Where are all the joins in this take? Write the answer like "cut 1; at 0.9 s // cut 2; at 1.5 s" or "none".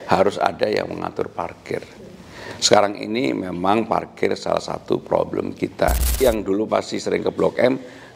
cut 1; at 6.0 s